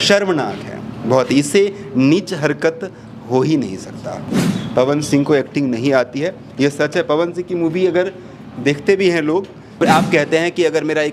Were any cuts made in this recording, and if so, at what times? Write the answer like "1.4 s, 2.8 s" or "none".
4.3 s, 9.8 s